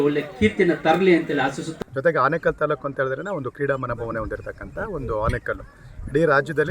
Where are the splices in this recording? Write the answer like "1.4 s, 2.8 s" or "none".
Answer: 1.7 s